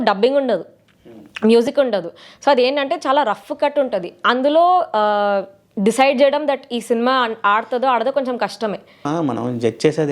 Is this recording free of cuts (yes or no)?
no